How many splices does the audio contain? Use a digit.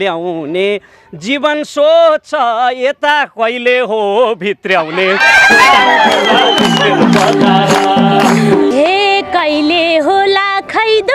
1